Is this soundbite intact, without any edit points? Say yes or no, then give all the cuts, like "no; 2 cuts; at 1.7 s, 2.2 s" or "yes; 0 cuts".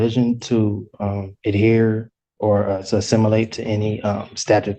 yes; 0 cuts